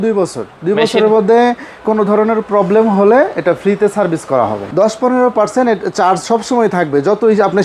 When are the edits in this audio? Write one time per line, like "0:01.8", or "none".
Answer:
0:04.6